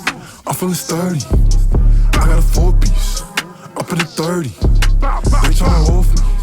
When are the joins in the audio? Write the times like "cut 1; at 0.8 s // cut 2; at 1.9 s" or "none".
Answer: none

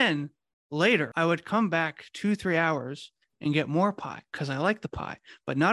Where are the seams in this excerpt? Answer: cut 1; at 1.1 s

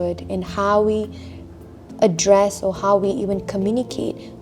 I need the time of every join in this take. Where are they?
none

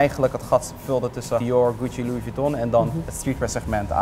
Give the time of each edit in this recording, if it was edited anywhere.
cut 1; at 1.4 s // cut 2; at 3.1 s

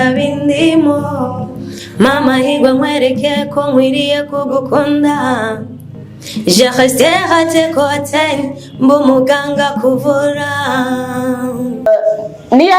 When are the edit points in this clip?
cut 1; at 11.9 s

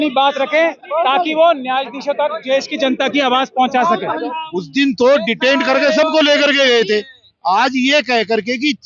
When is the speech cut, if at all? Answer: cut 1; at 4.3 s

